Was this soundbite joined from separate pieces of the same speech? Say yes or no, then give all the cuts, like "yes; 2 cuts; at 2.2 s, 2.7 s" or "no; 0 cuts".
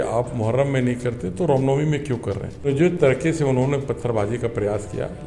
yes; 1 cut; at 2.7 s